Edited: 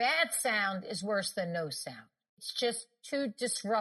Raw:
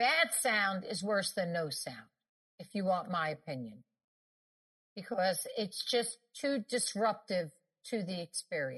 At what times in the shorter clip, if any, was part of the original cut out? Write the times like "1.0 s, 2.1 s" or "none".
2.5 s